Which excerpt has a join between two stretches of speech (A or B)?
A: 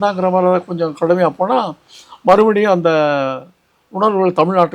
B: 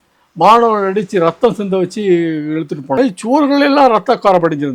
B